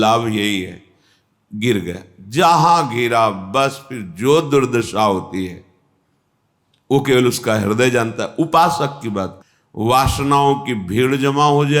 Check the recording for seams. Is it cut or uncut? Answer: cut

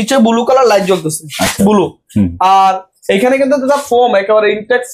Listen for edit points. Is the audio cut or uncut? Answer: uncut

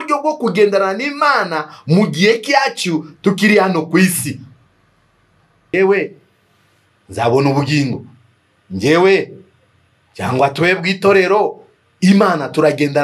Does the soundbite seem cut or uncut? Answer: cut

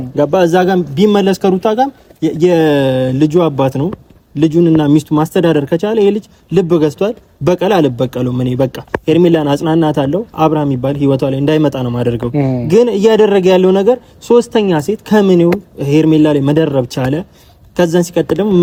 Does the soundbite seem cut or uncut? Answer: uncut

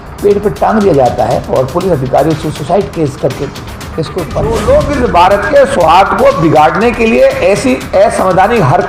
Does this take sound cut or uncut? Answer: cut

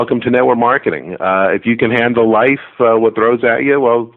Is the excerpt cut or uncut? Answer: uncut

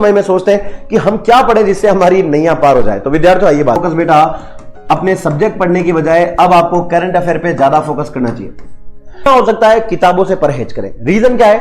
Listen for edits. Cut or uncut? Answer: cut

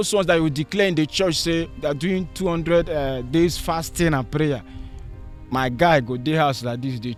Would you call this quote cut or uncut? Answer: uncut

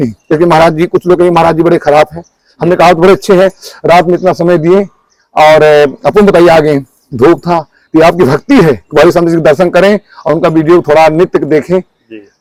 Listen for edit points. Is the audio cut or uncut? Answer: uncut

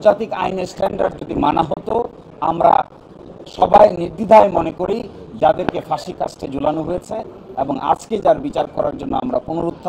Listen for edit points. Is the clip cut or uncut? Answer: uncut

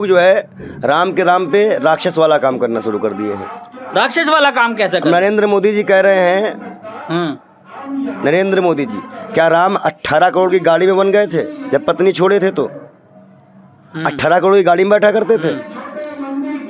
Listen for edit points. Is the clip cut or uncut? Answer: uncut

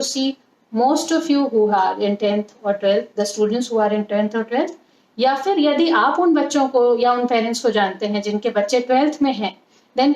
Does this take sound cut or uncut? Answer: uncut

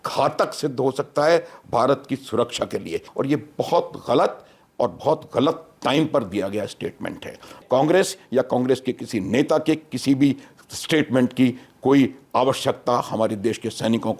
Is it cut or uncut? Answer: cut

